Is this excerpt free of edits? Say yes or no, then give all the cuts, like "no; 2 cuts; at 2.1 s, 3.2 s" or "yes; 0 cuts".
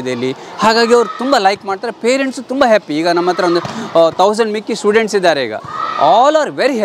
yes; 0 cuts